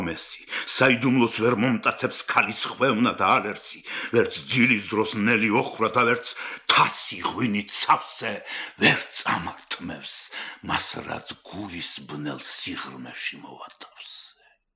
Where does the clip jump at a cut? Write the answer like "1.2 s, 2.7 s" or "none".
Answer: none